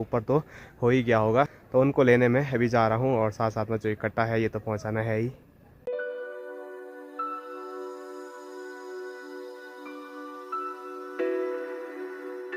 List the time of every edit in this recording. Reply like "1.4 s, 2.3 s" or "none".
none